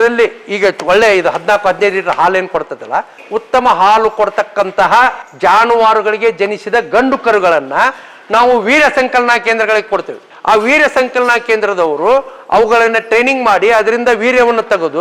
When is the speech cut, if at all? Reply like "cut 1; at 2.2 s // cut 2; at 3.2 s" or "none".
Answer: cut 1; at 3.2 s // cut 2; at 5.2 s